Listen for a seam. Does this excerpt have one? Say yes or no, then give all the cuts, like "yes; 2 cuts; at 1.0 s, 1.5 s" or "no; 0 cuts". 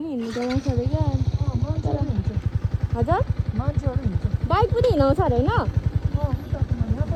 no; 0 cuts